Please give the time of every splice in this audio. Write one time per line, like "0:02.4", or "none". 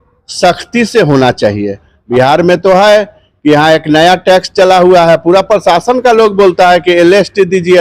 0:02.0